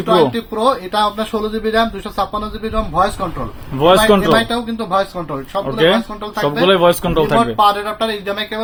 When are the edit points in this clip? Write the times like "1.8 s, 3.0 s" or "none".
none